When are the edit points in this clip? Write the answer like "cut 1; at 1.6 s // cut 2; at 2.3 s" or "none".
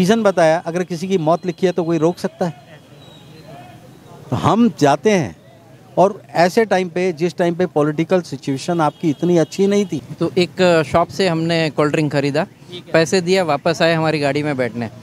cut 1; at 10.0 s